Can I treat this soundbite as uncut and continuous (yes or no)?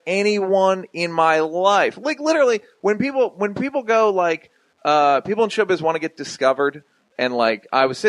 no